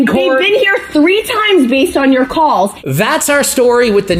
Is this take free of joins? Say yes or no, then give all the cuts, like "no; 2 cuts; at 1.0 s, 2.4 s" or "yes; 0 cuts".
no; 1 cut; at 2.8 s